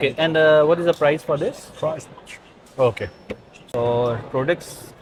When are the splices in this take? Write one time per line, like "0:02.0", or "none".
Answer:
none